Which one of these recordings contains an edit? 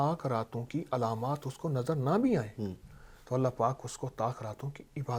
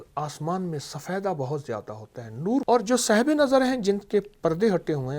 second; 1 cut; at 2.6 s

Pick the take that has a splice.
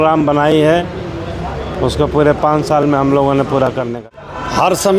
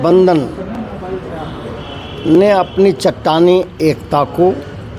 first; 1 cut; at 3.9 s

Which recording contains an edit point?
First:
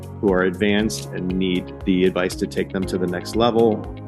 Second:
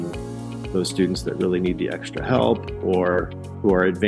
first; 1 cut; at 1.8 s

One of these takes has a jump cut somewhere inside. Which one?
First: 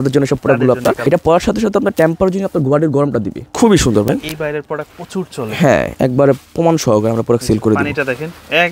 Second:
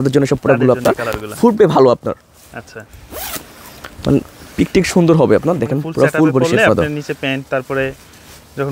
first; 3 cuts; at 1.0 s, 3.4 s, 5.9 s

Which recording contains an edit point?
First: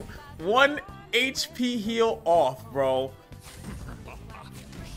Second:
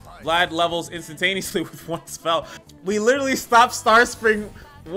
second; 1 cut; at 2.5 s

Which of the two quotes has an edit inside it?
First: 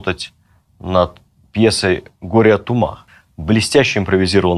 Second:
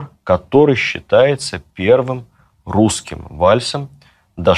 first; 1 cut; at 3.0 s

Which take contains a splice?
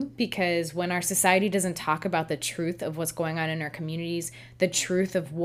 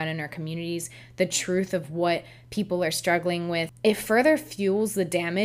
second; 1 cut; at 3.7 s

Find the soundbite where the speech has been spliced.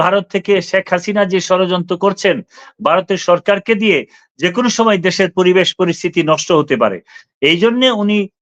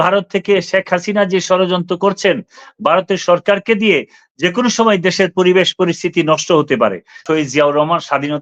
second; 1 cut; at 7.2 s

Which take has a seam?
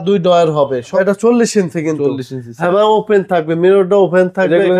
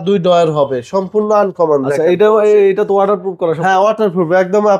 first; 1 cut; at 0.9 s

